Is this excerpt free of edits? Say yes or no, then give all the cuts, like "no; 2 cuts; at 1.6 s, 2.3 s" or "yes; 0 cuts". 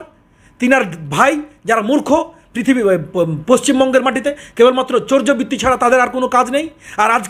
yes; 0 cuts